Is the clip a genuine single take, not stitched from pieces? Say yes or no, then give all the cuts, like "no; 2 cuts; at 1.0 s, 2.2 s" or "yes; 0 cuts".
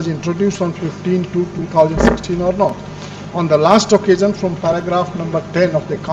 yes; 0 cuts